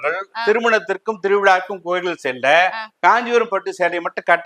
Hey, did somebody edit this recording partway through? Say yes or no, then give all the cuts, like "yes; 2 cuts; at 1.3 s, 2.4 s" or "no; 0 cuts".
no; 0 cuts